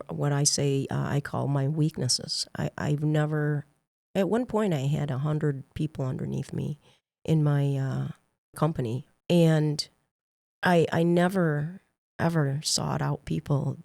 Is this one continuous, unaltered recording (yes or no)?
no